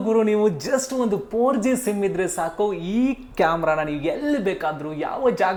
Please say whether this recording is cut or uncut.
uncut